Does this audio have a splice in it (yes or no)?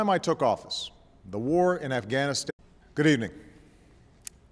no